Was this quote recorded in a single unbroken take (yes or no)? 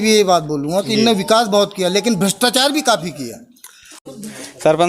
no